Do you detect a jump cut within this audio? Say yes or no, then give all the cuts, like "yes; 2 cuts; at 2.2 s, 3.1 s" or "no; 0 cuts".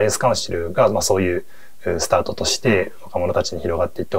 no; 0 cuts